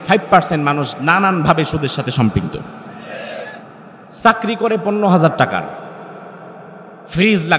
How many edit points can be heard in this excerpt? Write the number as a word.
one